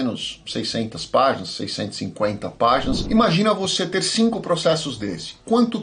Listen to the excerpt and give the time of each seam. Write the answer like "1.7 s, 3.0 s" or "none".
none